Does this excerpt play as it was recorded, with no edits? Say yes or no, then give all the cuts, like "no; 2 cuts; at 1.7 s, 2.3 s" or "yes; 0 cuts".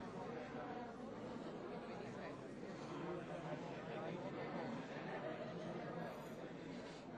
yes; 0 cuts